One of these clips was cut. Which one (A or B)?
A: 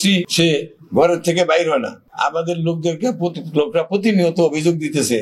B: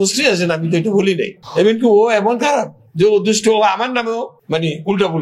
B